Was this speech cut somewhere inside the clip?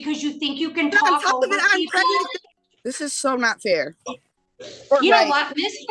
yes; 1 cut; at 2.4 s

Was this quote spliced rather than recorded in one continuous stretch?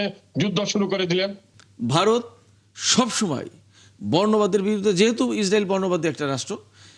yes; 1 cut; at 1.5 s

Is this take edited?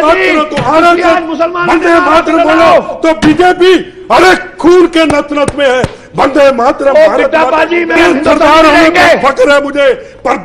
yes; 1 cut; at 8.0 s

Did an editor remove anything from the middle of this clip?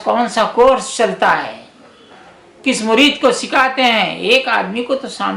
no; 0 cuts

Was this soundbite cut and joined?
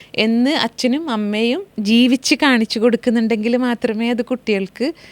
yes; 1 cut; at 1.7 s

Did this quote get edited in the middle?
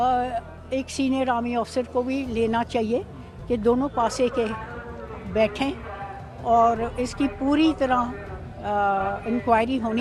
no; 0 cuts

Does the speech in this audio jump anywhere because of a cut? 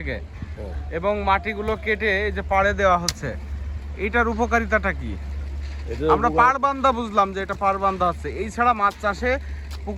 no; 0 cuts

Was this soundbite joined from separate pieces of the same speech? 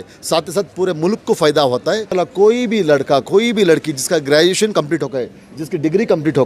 yes; 1 cut; at 2.1 s

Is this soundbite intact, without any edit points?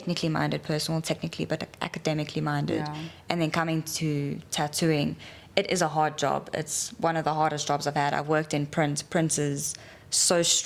yes; 0 cuts

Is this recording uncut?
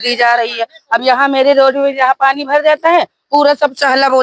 yes; 0 cuts

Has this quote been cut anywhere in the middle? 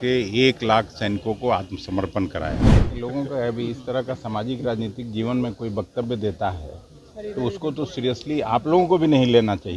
yes; 1 cut; at 2.9 s

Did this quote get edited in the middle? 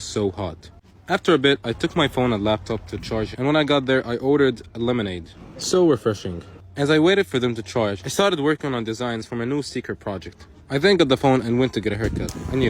yes; 1 cut; at 3.3 s

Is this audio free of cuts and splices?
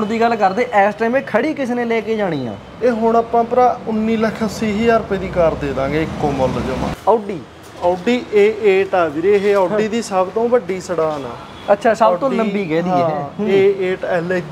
no; 1 cut; at 6.9 s

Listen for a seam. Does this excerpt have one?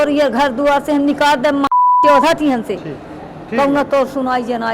no; 0 cuts

